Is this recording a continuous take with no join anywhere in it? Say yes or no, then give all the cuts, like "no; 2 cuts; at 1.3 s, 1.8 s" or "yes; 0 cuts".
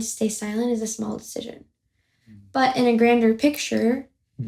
yes; 0 cuts